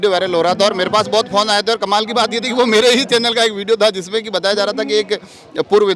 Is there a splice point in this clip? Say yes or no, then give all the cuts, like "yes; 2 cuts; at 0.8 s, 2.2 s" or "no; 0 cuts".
no; 0 cuts